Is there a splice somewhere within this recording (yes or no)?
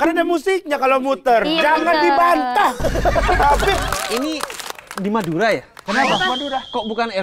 yes